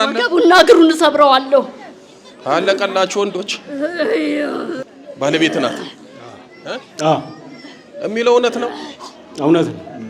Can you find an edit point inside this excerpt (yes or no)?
yes